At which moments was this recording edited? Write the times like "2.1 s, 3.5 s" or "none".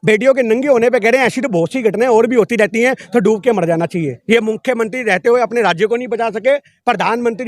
4.1 s